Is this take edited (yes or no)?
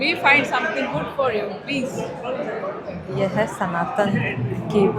no